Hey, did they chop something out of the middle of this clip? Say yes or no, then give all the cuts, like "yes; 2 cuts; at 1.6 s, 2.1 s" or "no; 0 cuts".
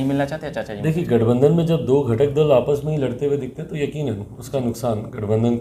no; 0 cuts